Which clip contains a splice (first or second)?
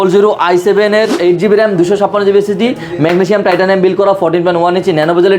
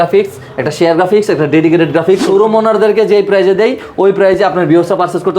second